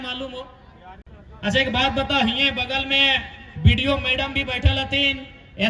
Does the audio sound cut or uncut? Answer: uncut